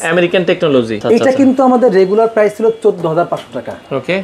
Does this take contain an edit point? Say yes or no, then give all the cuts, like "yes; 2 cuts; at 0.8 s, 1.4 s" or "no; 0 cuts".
yes; 1 cut; at 1.0 s